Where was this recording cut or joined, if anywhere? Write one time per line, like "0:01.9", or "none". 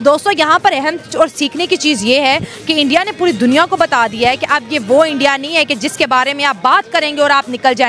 none